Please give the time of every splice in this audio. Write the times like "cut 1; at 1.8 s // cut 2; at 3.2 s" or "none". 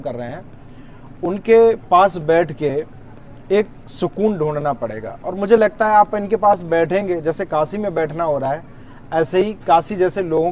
none